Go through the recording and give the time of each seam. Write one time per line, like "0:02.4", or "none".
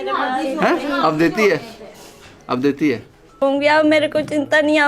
0:03.4

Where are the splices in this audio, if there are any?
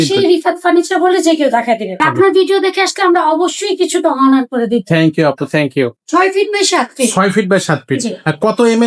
0:02.0
0:05.9

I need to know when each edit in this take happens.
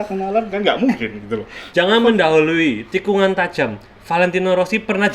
0:01.5

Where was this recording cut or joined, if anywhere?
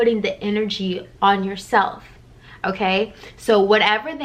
none

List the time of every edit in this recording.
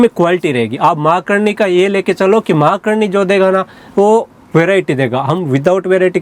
none

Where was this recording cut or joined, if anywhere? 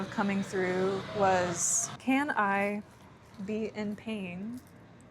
0:01.9

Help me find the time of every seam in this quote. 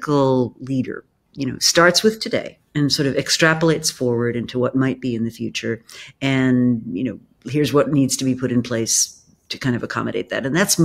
none

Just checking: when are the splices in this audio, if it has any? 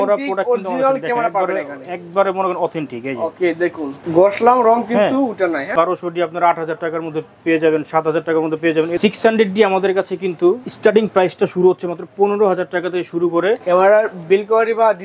0:05.7
0:09.0
0:13.6

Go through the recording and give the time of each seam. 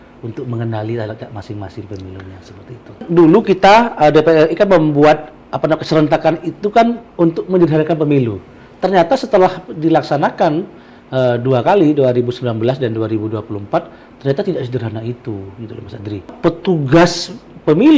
0:03.0
0:16.3

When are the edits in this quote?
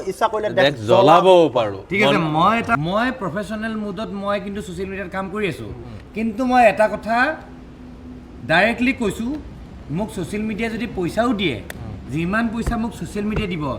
0:02.8

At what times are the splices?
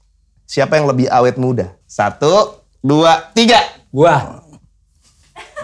none

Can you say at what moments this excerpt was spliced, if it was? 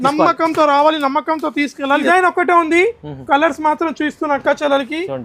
0:02.0

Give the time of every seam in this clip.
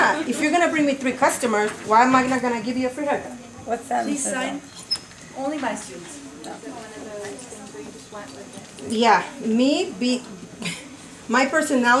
0:06.5

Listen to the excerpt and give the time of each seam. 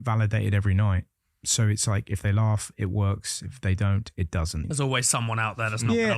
0:04.7

